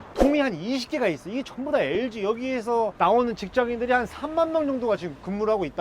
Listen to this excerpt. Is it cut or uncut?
uncut